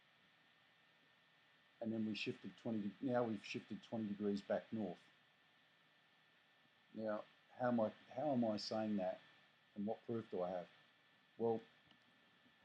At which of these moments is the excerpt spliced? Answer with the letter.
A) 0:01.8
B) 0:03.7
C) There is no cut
B